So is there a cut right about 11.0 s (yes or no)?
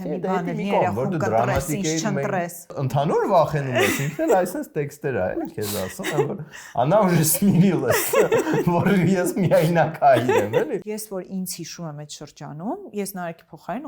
yes